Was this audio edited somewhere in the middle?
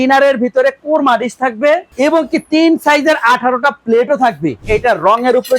yes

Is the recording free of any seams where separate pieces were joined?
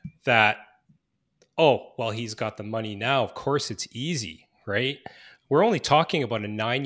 yes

